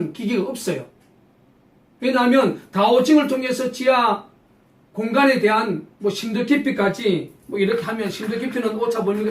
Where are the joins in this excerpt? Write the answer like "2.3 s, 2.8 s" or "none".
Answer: 8.2 s